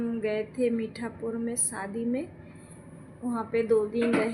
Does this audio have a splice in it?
no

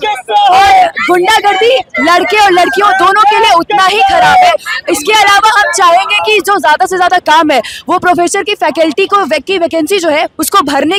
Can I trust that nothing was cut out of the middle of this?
yes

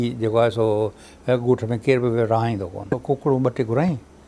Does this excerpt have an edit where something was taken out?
yes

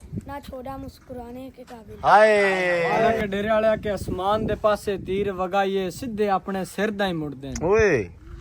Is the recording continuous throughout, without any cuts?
no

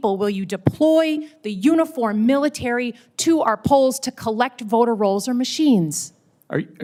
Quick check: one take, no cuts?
yes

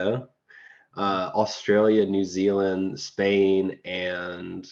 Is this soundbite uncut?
yes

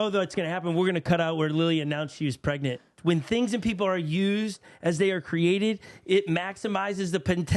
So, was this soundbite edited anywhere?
yes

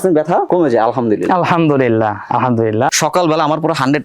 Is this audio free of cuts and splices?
no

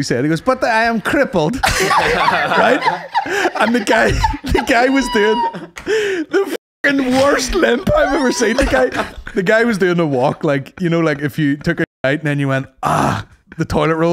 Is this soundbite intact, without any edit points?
yes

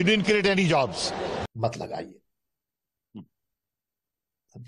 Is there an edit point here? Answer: yes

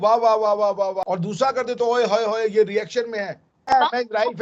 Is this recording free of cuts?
no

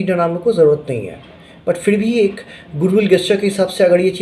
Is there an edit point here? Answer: no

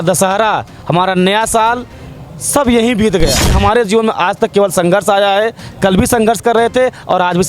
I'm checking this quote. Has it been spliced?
yes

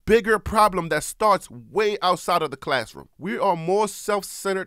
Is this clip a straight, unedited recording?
no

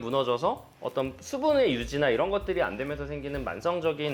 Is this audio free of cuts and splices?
yes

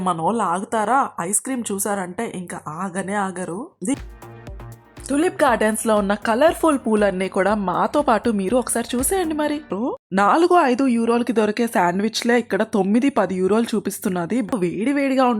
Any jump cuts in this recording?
yes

